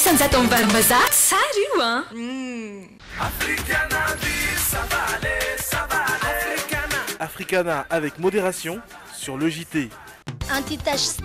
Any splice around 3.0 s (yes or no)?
yes